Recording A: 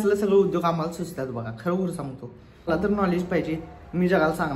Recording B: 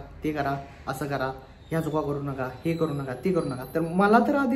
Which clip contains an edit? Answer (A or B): A